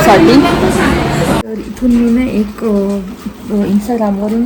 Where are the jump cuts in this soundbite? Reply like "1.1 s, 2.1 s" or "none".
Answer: 1.6 s